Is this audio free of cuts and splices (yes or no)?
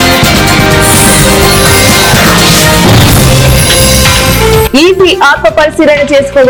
yes